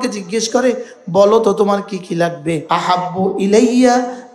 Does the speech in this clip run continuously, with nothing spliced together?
no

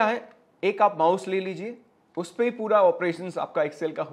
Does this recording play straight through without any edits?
yes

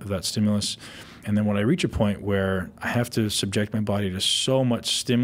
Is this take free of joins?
no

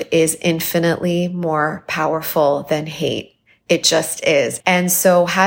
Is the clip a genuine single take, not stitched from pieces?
no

